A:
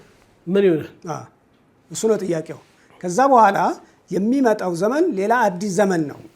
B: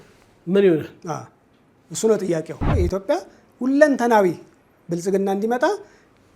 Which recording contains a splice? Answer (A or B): B